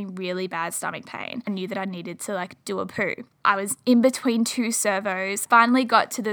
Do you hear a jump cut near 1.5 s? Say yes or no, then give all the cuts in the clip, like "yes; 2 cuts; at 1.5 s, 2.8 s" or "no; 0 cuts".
yes; 3 cuts; at 1.5 s, 3.3 s, 5.4 s